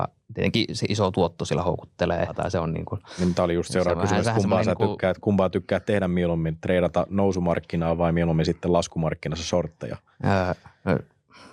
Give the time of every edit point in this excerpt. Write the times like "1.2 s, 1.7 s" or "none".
2.3 s